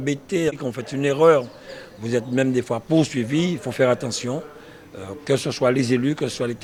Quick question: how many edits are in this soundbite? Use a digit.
0